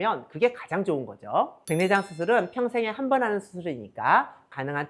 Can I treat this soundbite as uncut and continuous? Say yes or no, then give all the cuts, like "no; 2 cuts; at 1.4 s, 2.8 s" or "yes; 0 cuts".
no; 1 cut; at 1.6 s